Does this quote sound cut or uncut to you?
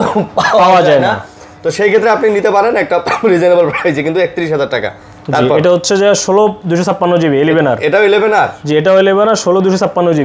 uncut